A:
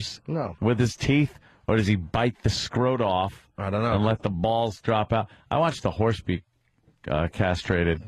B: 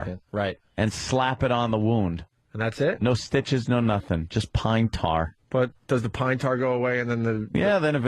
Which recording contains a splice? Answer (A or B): B